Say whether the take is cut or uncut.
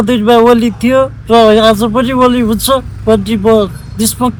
uncut